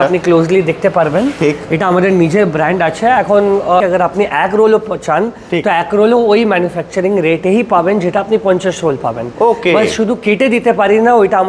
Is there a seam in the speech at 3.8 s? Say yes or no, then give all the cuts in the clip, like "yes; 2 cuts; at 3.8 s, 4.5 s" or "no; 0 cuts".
yes; 1 cut; at 3.8 s